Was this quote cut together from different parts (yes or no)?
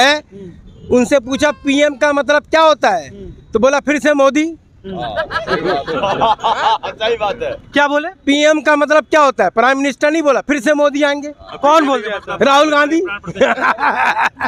no